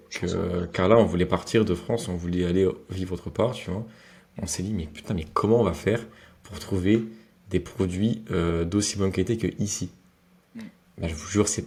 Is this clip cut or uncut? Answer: uncut